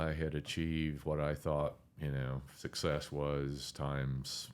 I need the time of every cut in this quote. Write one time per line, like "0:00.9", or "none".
none